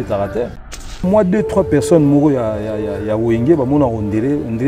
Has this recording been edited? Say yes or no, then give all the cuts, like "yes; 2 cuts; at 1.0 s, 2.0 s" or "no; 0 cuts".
yes; 1 cut; at 1.0 s